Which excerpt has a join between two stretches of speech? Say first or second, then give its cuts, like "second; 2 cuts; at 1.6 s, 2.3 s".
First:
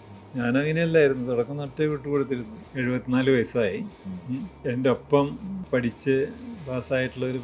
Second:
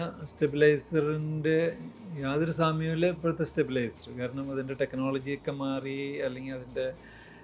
first; 3 cuts; at 2.6 s, 4.5 s, 5.5 s